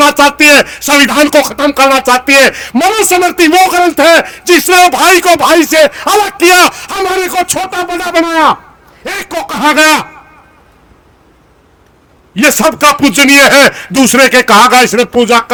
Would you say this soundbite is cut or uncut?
uncut